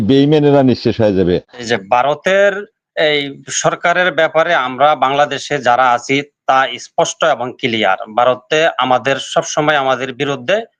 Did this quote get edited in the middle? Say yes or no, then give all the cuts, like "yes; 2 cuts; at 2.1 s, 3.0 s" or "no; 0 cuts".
yes; 1 cut; at 1.6 s